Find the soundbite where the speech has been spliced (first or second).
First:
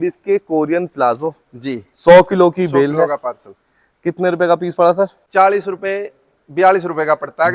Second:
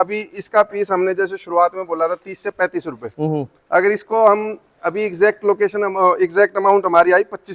first